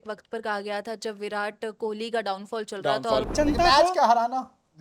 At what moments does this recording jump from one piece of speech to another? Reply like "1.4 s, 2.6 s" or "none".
3.3 s